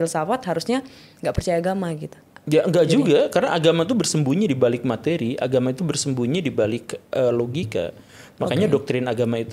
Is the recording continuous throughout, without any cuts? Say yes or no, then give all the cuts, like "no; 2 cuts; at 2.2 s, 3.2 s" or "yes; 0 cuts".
yes; 0 cuts